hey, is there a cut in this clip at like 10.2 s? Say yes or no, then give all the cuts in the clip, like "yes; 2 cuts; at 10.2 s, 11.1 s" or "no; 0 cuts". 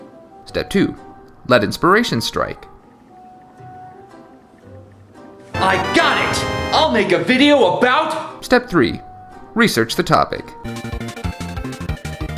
no; 1 cut; at 7.5 s